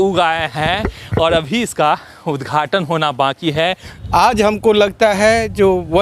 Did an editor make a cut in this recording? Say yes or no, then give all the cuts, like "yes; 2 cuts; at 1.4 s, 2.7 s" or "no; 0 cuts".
yes; 1 cut; at 3.9 s